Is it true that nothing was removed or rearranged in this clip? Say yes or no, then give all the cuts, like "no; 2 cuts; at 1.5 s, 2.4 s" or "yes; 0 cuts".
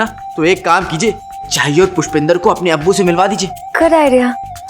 no; 1 cut; at 3.5 s